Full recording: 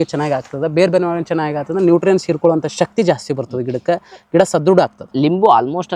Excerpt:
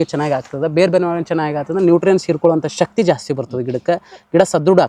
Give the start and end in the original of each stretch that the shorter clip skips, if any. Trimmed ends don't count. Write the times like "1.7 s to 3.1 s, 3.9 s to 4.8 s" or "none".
none